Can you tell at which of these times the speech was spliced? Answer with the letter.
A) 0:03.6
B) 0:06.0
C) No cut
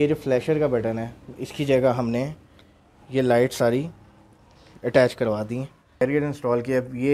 B